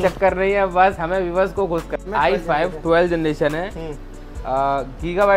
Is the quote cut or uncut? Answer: cut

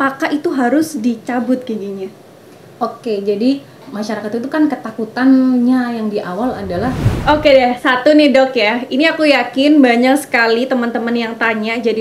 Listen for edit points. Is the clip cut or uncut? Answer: cut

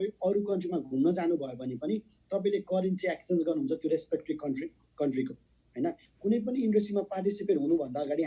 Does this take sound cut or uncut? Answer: cut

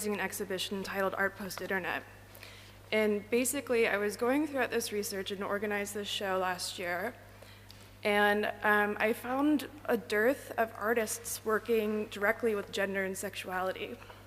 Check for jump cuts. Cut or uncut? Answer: cut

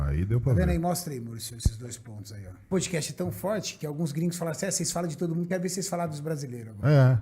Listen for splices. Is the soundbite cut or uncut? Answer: cut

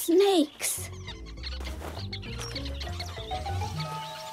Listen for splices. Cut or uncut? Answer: uncut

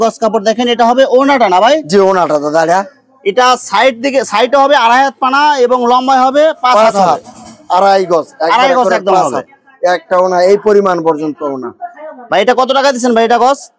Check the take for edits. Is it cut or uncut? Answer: uncut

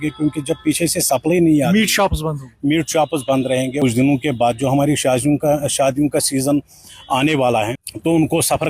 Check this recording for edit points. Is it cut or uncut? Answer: cut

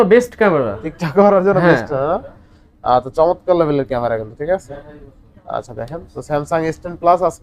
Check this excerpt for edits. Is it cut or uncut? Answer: uncut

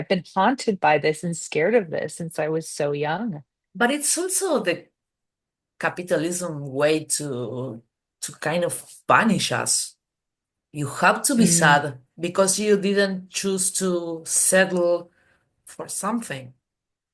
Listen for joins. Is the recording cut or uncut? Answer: uncut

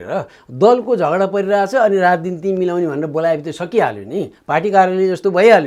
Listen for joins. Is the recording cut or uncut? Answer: uncut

